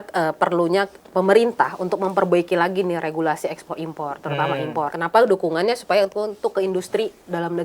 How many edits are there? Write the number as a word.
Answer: one